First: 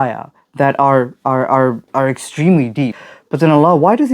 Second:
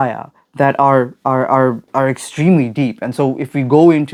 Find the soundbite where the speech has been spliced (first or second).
first